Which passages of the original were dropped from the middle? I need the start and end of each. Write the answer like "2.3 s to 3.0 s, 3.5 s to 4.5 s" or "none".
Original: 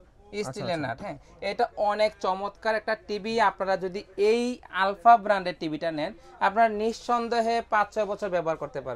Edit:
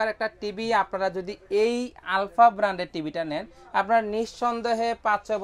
none